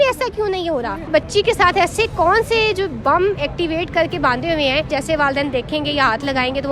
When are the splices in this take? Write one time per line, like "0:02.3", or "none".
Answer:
0:01.1
0:04.9